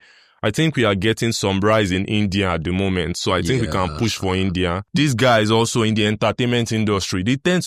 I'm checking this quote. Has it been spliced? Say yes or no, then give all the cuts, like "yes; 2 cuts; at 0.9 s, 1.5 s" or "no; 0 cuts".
yes; 1 cut; at 4.8 s